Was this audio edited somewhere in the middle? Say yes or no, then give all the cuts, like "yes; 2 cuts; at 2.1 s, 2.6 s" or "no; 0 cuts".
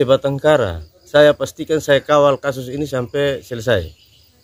yes; 1 cut; at 1.1 s